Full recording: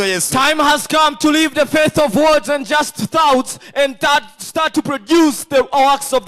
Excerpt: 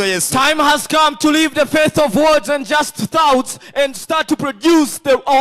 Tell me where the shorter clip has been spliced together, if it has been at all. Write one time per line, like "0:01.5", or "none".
0:03.9